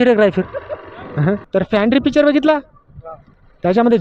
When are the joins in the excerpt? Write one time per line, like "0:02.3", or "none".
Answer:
0:01.4